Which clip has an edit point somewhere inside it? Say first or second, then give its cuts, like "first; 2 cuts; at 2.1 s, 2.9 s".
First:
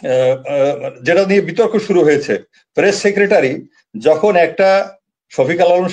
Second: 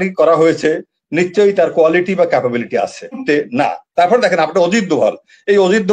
second; 1 cut; at 3.2 s